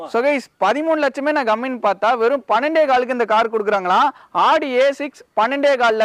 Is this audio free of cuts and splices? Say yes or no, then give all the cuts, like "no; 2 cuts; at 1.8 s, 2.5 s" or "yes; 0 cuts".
yes; 0 cuts